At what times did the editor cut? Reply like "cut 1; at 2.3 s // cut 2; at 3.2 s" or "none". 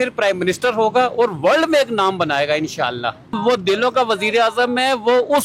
cut 1; at 3.4 s